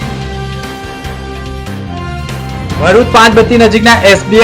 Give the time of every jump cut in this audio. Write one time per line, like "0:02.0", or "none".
0:00.9